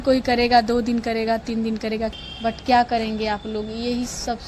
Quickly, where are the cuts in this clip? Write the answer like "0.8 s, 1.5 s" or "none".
2.1 s